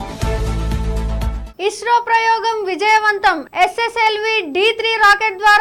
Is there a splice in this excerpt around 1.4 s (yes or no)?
no